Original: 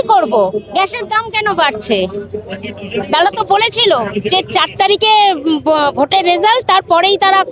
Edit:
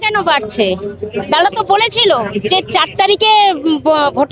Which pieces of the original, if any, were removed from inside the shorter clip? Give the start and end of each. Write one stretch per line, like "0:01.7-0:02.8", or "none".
0:02.4-0:02.9